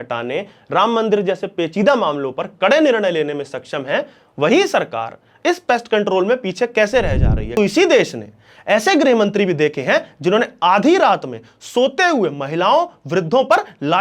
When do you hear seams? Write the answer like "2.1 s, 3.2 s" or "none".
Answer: 7.5 s